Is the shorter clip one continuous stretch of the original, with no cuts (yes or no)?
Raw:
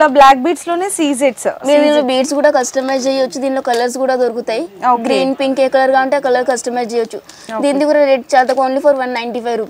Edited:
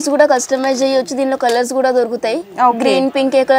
yes